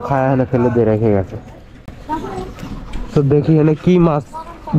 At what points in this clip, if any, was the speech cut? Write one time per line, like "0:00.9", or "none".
none